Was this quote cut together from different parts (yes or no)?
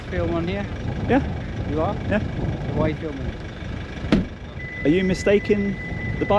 no